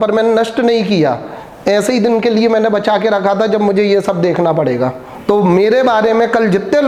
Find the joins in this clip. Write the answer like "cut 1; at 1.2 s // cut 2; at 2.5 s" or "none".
none